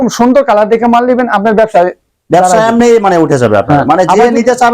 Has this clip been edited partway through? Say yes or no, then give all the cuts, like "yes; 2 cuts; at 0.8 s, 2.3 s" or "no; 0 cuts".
no; 0 cuts